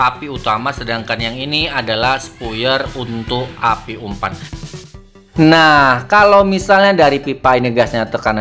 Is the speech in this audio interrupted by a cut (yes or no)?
yes